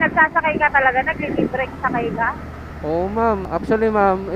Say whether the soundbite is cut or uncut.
uncut